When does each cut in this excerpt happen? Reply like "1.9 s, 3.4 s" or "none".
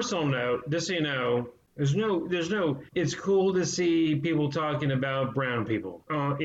none